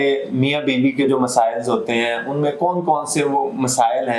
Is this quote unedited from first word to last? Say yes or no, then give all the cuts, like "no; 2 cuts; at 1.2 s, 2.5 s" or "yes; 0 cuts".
yes; 0 cuts